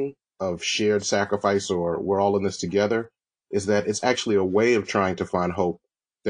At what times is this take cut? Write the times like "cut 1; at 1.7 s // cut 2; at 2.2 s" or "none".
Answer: none